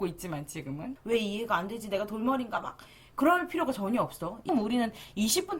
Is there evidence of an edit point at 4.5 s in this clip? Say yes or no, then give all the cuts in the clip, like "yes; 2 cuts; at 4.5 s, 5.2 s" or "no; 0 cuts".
yes; 2 cuts; at 0.9 s, 4.5 s